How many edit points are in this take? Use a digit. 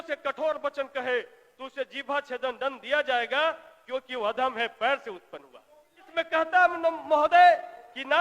1